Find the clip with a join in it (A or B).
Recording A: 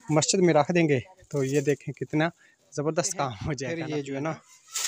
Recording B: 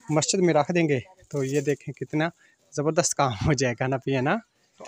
A